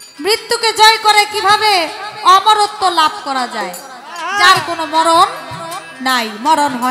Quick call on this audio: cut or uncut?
uncut